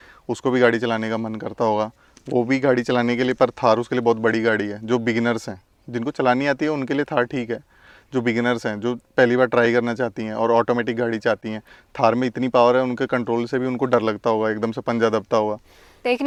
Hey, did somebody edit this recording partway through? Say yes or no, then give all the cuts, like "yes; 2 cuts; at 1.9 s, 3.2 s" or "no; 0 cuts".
no; 0 cuts